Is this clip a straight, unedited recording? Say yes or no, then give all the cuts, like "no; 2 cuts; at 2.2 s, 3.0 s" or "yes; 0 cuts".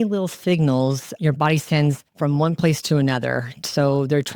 yes; 0 cuts